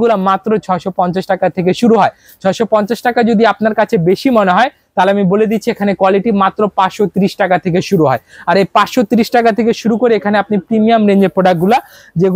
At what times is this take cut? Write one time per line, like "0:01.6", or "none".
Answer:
none